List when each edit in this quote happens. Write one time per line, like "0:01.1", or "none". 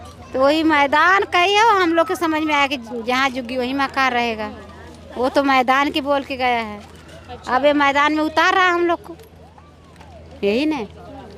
none

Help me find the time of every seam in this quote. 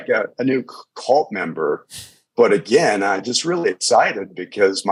none

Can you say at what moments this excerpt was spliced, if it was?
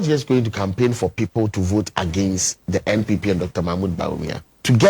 none

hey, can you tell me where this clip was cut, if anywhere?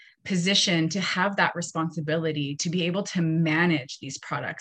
none

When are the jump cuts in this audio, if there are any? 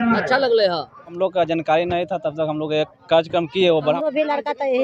0:01.2
0:03.9

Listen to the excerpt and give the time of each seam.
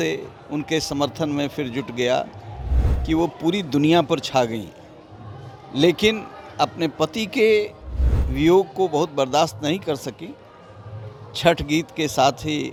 none

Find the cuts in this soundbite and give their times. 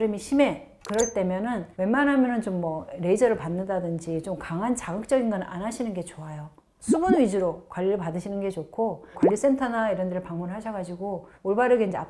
0:09.1

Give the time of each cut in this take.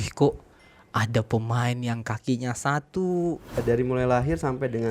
0:03.5

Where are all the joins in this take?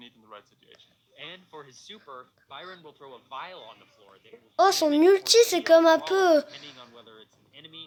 none

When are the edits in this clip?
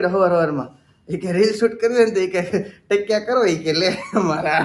none

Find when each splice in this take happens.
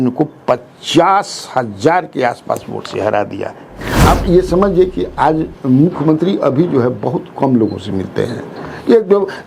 0:03.7

